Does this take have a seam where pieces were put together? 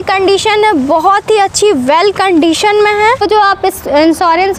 yes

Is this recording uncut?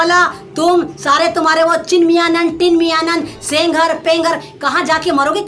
yes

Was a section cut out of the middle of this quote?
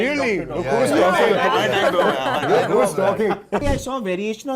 yes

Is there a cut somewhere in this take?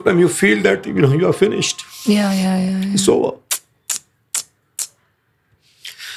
no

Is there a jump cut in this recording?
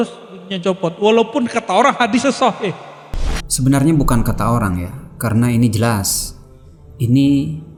no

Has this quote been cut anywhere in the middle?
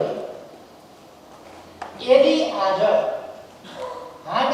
yes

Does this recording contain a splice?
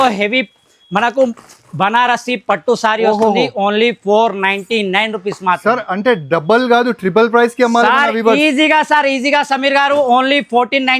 no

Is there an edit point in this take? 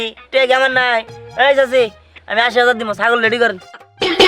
no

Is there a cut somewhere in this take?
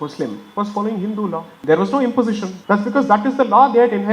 yes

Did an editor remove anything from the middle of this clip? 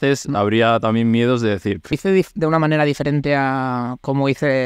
yes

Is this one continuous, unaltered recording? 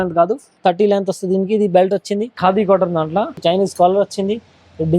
no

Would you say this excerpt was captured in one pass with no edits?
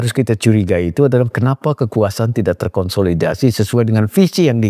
yes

